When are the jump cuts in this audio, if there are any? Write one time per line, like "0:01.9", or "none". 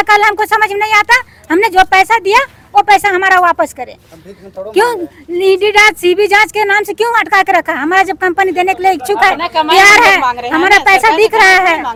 none